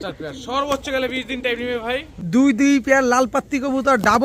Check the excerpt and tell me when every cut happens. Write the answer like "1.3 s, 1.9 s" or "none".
2.1 s